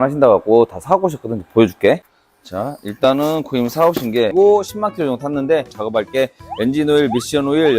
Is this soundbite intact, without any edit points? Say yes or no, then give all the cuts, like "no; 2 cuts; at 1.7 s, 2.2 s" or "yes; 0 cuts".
no; 2 cuts; at 4.3 s, 5.8 s